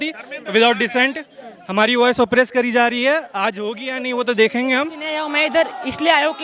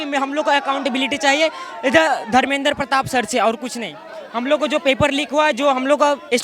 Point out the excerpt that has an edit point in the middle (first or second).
first